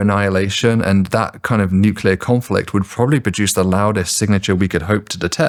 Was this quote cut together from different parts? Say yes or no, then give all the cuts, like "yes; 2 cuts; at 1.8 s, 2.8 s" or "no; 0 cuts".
no; 0 cuts